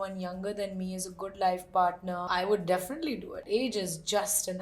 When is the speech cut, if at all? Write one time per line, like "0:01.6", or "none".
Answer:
0:02.3
0:03.3